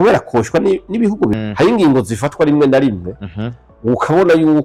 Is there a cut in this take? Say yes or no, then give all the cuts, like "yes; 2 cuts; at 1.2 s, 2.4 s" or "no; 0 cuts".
yes; 1 cut; at 1.3 s